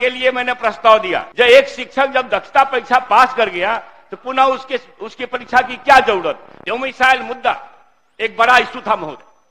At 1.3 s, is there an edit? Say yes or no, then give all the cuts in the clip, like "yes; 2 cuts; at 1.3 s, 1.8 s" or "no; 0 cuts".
yes; 2 cuts; at 1.3 s, 6.5 s